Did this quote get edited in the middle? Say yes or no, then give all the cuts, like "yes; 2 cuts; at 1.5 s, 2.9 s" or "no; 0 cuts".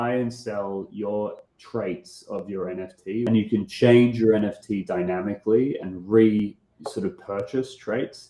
yes; 1 cut; at 3.3 s